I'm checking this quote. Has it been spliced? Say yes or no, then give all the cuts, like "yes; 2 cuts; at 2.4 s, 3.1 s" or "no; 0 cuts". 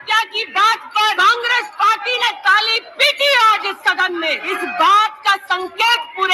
yes; 2 cuts; at 1.0 s, 4.5 s